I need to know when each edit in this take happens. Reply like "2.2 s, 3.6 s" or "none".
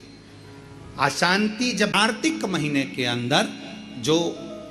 2.1 s